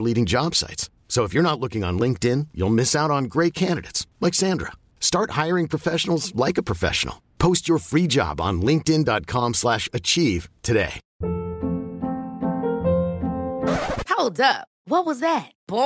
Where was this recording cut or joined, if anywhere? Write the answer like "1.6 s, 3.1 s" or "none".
11.0 s